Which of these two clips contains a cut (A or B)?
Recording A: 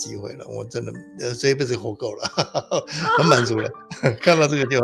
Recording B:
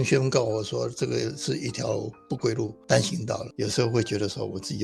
B